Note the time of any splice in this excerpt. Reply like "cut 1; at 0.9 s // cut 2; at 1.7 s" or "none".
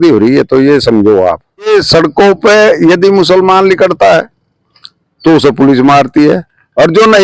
cut 1; at 1.7 s